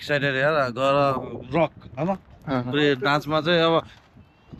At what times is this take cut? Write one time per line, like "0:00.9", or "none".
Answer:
none

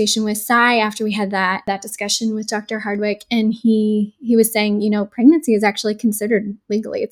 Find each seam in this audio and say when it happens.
0:01.6

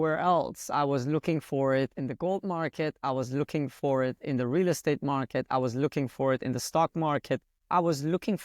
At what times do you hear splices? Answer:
0:07.5

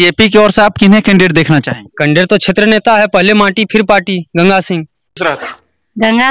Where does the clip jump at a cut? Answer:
0:05.2

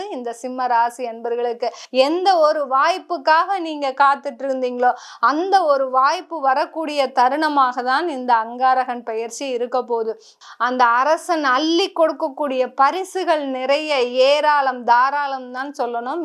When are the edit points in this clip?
0:01.8
0:10.4

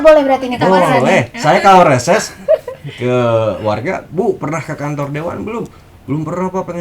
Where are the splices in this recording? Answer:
none

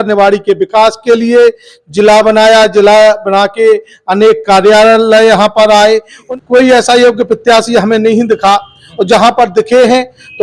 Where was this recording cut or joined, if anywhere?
0:06.2

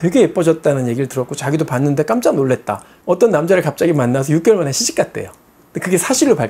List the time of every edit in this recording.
0:03.0

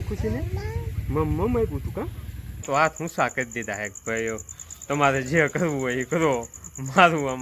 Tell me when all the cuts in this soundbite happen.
0:02.6

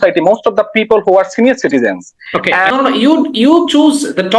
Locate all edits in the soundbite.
0:02.7

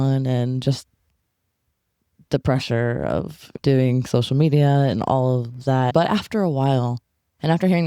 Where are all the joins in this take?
0:05.9

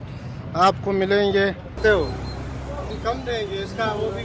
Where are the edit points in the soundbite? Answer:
0:01.8

